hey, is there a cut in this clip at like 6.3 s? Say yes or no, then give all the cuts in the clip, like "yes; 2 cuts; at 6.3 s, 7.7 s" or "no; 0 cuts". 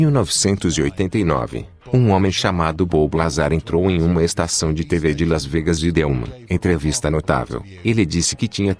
yes; 1 cut; at 6.3 s